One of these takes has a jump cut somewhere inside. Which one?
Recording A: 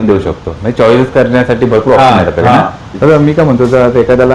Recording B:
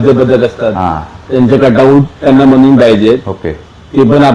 A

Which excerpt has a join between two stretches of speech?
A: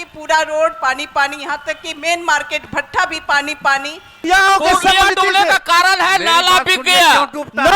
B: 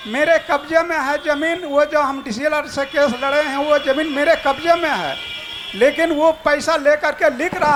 A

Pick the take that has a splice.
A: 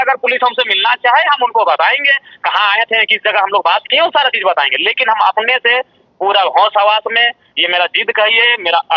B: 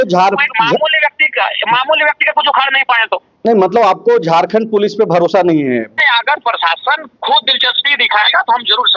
B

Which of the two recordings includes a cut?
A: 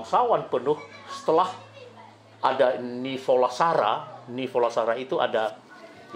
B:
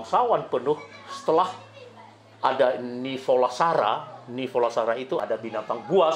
B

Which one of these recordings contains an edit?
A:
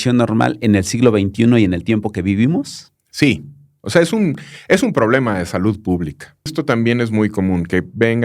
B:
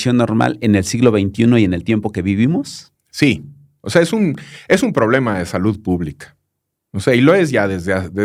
A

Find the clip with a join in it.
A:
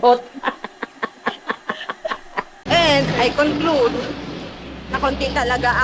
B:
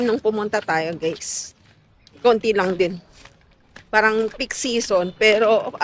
A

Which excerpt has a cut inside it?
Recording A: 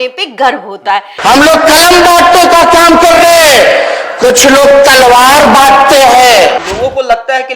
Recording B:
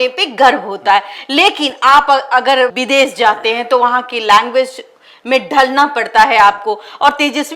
A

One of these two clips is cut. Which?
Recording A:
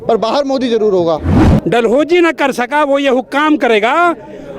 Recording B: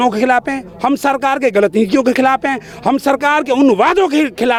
A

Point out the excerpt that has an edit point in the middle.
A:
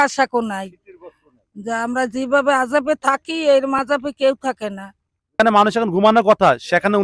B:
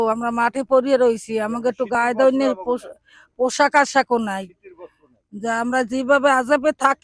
A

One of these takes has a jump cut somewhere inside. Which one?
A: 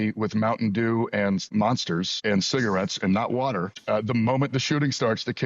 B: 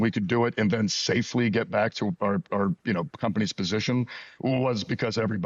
A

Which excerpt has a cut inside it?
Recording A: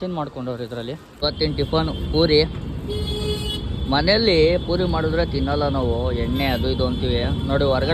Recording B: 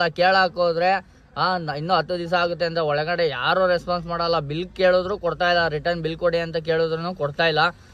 A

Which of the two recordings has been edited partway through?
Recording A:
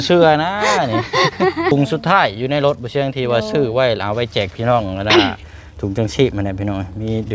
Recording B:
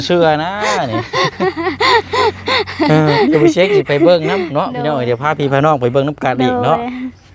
A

